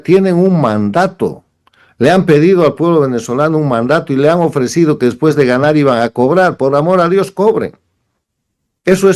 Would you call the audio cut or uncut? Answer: uncut